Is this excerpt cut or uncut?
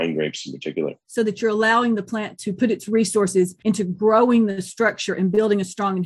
cut